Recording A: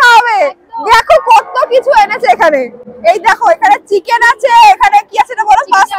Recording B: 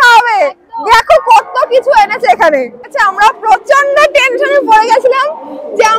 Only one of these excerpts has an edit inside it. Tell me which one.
B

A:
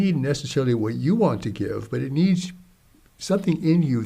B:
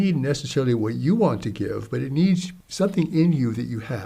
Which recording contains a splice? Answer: B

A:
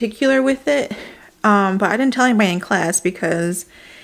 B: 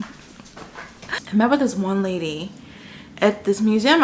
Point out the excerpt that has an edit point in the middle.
B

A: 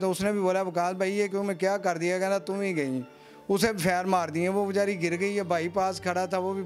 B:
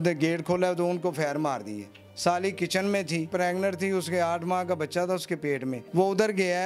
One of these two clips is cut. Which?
B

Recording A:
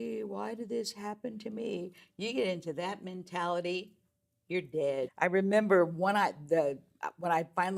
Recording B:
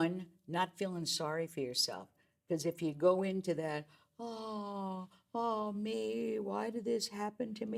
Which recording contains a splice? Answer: A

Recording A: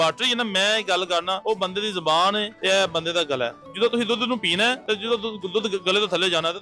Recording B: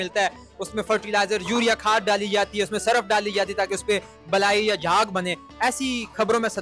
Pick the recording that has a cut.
A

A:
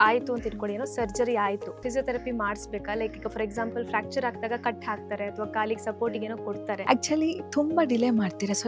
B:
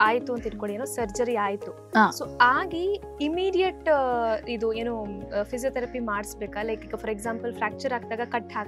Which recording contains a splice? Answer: A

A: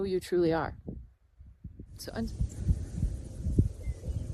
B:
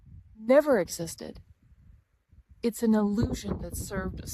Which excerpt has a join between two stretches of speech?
A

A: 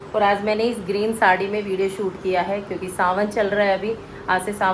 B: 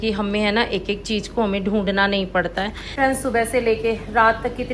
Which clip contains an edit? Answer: B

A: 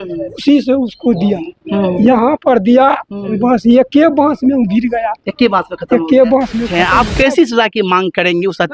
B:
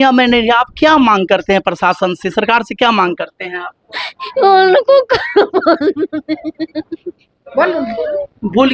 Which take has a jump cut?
A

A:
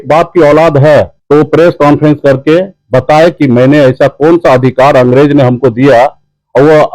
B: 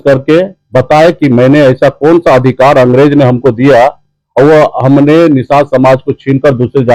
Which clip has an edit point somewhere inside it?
A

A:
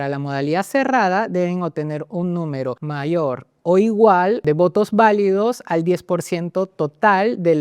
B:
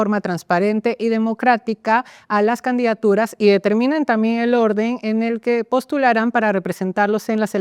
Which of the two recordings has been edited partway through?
A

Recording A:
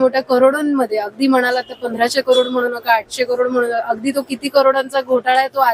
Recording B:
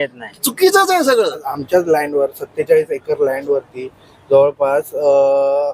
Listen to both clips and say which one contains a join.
B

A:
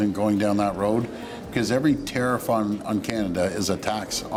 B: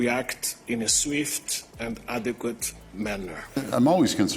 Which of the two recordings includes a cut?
B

